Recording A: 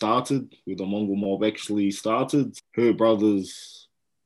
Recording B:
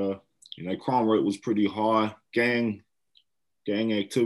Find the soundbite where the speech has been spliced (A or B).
A